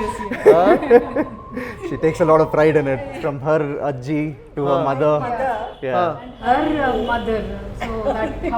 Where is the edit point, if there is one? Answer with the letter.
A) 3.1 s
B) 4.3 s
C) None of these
A